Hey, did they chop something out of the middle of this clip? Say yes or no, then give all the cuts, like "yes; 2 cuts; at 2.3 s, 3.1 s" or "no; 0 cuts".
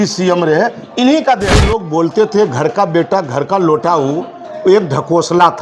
yes; 1 cut; at 1.6 s